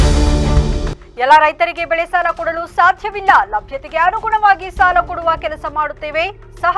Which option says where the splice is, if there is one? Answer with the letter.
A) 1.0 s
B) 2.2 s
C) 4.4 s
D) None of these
A